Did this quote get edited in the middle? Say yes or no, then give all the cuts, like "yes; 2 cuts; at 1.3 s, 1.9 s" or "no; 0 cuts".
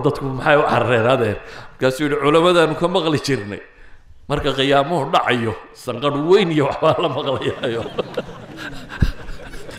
no; 0 cuts